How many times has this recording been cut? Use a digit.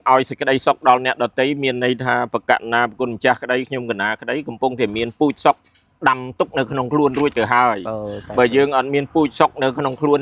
0